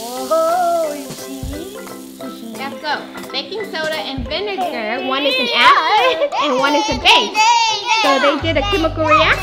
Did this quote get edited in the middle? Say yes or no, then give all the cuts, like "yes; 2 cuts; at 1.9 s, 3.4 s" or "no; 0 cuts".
no; 0 cuts